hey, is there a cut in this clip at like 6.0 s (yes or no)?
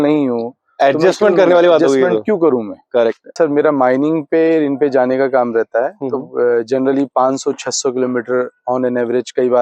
no